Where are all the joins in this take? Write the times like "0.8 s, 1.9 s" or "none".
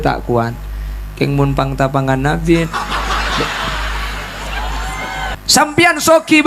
5.4 s